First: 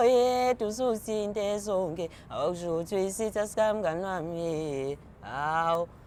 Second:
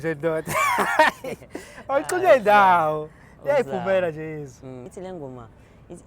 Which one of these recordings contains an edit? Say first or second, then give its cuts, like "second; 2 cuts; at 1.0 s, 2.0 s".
second; 1 cut; at 4.9 s